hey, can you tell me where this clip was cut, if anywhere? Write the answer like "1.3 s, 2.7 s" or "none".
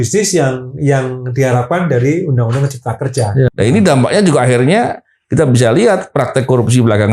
3.5 s